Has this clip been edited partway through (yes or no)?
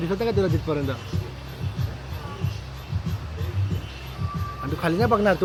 no